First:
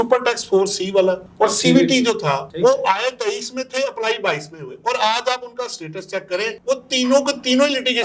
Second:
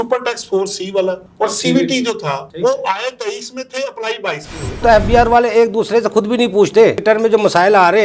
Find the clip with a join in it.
second; 2 cuts; at 4.8 s, 7.0 s

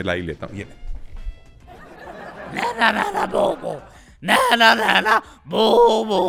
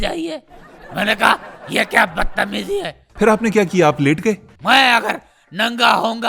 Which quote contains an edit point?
second; 2 cuts; at 3.0 s, 4.5 s

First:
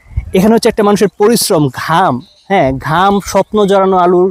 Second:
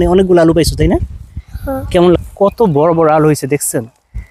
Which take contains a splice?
second; 1 cut; at 2.3 s

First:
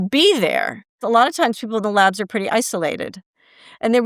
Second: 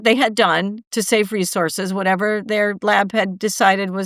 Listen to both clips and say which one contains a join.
first; 1 cut; at 1.0 s

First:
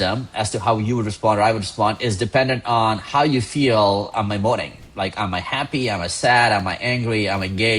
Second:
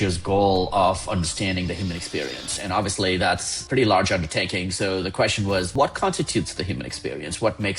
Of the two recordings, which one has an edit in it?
second; 2 cuts; at 3.5 s, 5.7 s

